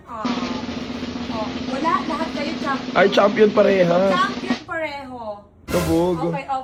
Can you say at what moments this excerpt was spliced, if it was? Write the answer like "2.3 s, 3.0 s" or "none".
none